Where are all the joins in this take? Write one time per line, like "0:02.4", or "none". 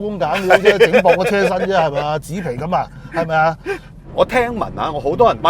0:04.0